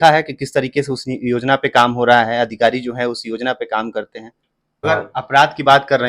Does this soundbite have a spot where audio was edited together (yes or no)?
yes